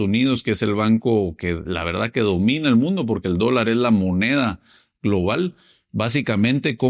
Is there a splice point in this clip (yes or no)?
no